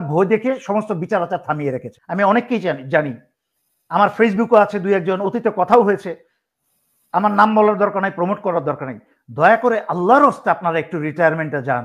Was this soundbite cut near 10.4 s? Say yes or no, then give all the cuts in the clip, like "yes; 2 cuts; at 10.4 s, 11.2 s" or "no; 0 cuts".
no; 1 cut; at 1.9 s